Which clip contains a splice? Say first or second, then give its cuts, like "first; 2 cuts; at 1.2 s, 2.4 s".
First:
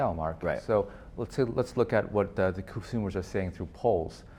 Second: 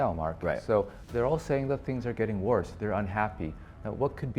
second; 1 cut; at 1.0 s